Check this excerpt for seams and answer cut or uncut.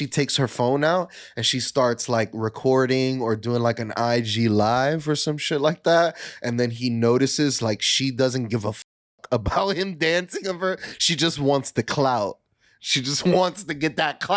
uncut